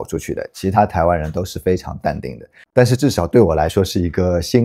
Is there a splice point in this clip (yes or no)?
no